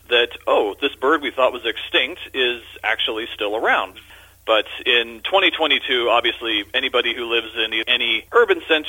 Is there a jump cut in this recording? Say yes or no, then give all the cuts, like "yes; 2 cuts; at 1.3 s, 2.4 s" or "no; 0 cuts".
yes; 2 cuts; at 3.9 s, 7.8 s